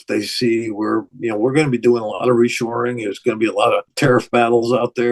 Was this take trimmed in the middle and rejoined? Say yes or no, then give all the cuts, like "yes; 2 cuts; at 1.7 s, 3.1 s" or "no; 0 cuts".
yes; 1 cut; at 3.9 s